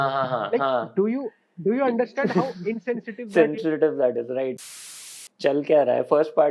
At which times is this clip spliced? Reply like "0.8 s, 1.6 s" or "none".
5.1 s